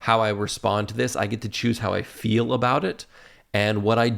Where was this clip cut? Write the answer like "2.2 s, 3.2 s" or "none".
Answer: none